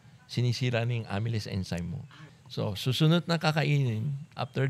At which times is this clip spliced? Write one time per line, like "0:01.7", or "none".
0:02.0